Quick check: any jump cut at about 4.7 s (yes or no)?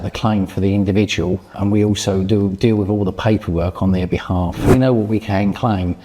yes